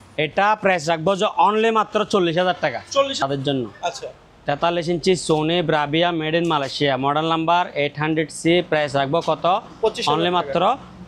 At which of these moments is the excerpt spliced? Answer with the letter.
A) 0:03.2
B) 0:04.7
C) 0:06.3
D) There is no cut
A